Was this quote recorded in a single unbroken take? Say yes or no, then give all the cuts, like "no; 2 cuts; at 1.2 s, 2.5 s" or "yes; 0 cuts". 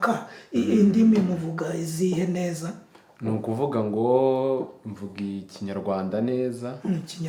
yes; 0 cuts